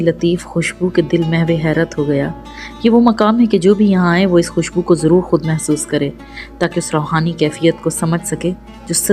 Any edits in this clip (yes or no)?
no